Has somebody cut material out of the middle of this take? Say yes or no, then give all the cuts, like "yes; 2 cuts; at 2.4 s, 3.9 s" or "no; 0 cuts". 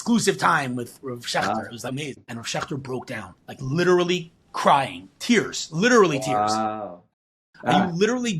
yes; 2 cuts; at 1.8 s, 7.0 s